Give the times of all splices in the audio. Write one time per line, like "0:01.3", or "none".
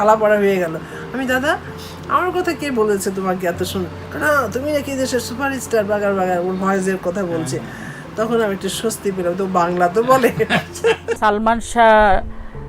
0:11.1